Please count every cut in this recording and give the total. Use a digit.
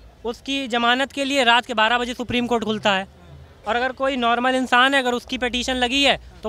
0